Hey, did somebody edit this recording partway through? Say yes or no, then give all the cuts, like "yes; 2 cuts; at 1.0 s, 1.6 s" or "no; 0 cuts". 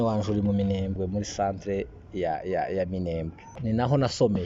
yes; 2 cuts; at 1.0 s, 3.6 s